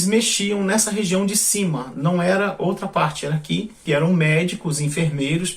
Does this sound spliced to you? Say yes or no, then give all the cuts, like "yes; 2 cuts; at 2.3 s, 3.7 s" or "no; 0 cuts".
yes; 1 cut; at 3.8 s